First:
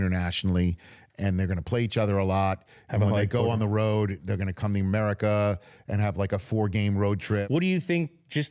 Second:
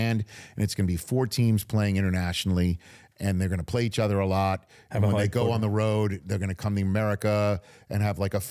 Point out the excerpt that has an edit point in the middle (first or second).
first